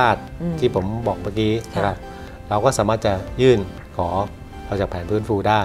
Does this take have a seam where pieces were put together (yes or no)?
no